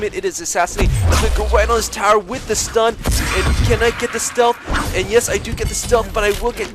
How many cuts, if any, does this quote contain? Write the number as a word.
zero